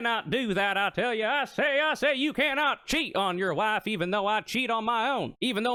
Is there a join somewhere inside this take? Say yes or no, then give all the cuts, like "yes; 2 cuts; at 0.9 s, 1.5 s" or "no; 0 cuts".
no; 0 cuts